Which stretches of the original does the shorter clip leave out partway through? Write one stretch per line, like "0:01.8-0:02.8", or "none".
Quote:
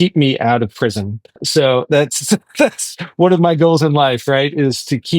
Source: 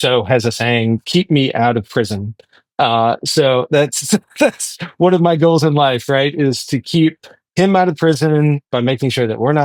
0:02.6-0:03.2